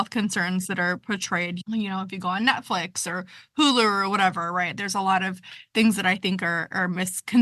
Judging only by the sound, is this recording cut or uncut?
cut